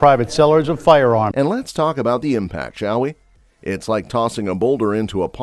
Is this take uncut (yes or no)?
yes